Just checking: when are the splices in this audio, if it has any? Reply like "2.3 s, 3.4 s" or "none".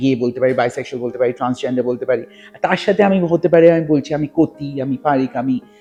none